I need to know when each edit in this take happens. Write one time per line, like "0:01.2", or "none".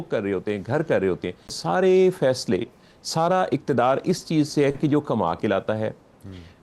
0:01.6